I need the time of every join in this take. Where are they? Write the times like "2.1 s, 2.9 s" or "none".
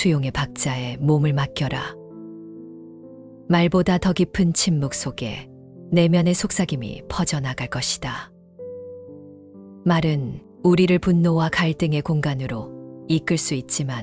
1.9 s, 3.4 s